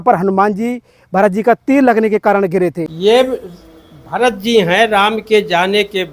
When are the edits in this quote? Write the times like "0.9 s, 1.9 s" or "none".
2.9 s